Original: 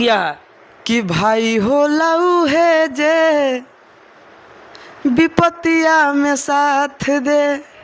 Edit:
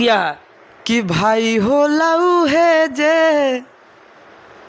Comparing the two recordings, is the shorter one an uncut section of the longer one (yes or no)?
yes